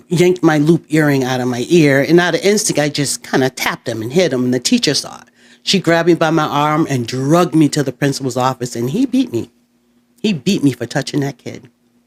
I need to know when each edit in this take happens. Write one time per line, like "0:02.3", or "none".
none